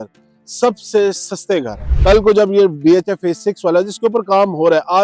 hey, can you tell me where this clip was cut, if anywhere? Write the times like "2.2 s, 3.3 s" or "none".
1.8 s